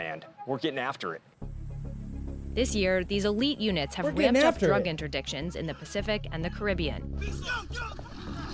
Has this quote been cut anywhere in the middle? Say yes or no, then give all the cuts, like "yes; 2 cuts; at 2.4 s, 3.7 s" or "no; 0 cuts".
no; 0 cuts